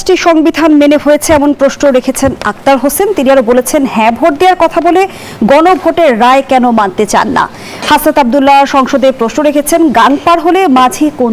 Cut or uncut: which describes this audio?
uncut